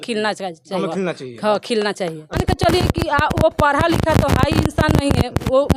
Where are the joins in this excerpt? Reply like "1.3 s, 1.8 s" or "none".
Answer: 2.4 s